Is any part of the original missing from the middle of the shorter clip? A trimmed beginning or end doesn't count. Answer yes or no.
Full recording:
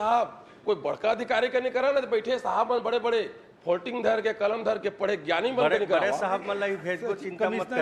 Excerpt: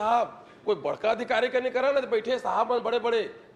no